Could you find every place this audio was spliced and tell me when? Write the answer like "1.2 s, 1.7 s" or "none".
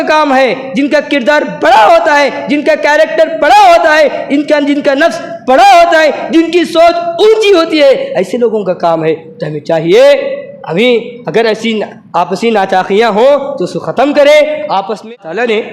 14.6 s